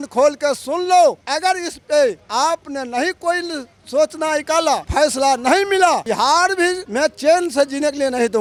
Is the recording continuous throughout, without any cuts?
yes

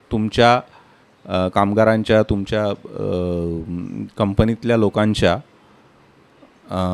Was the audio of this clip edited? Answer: no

